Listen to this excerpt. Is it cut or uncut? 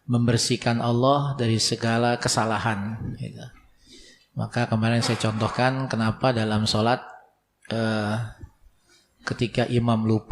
uncut